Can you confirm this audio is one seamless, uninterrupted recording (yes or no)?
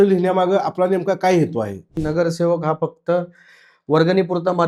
no